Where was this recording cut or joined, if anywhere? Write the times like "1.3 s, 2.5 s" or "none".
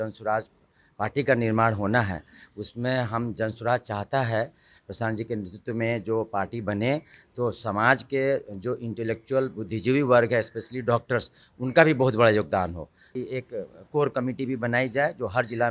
13.2 s